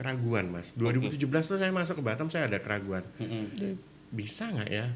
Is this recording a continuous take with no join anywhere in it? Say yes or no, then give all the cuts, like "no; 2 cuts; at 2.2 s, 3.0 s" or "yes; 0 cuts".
yes; 0 cuts